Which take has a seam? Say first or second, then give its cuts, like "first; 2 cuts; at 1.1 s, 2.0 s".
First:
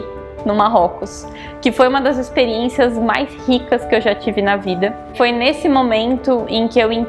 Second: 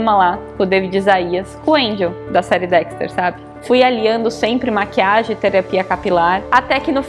second; 1 cut; at 3.5 s